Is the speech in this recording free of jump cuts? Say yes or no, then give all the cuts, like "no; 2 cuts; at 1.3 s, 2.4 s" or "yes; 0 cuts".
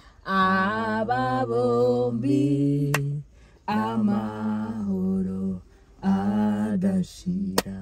yes; 0 cuts